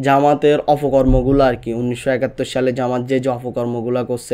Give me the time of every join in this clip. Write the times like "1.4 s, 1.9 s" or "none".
none